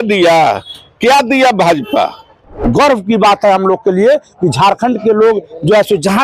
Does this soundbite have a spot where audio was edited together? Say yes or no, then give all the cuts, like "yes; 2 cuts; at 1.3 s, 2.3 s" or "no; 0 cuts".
yes; 1 cut; at 2.6 s